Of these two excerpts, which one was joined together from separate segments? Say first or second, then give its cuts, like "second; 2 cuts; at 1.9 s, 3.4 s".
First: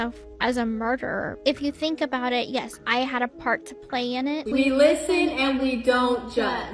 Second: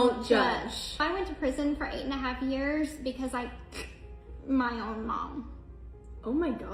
first; 1 cut; at 4.4 s